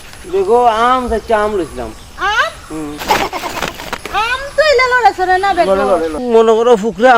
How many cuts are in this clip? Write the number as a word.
one